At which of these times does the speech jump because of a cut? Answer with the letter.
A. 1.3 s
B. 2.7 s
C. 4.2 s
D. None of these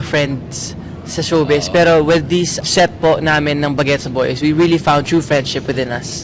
D